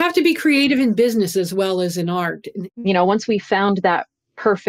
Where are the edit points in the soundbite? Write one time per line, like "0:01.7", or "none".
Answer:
0:02.5